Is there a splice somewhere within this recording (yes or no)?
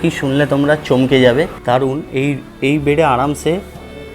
yes